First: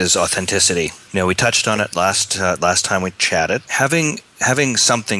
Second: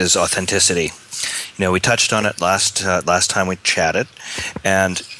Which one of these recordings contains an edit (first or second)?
first